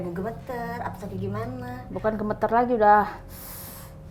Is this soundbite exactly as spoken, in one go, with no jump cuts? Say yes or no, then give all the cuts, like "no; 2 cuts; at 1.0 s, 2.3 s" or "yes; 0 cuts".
yes; 0 cuts